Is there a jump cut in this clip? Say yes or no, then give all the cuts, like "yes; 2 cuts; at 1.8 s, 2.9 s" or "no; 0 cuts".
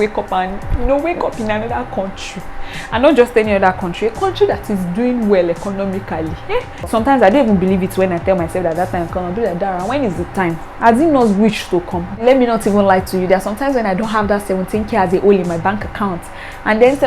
yes; 2 cuts; at 6.9 s, 12.2 s